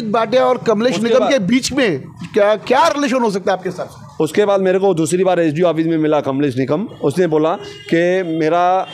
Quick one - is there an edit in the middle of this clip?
no; 0 cuts

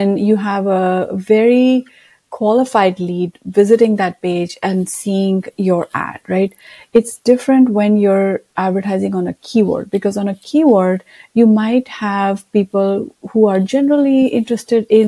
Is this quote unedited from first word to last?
yes; 0 cuts

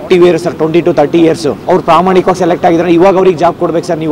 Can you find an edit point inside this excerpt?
yes; 1 cut; at 1.5 s

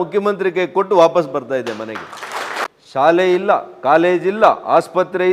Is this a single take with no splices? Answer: no; 1 cut; at 2.6 s

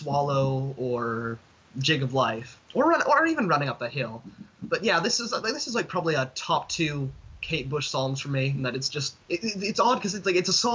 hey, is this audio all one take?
no; 2 cuts; at 2.5 s, 9.1 s

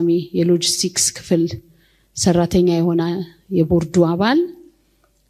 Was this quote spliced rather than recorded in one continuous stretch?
no; 0 cuts

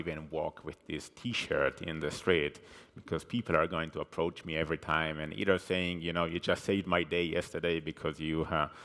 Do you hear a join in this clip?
no; 0 cuts

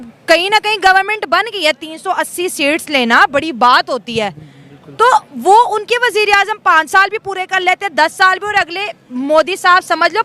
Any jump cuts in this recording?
no; 0 cuts

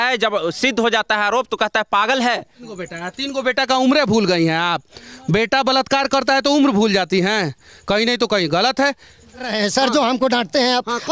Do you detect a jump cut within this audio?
yes; 2 cuts; at 2.8 s, 9.5 s

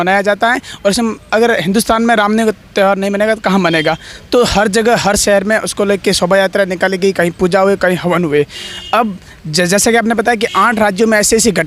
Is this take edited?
no; 0 cuts

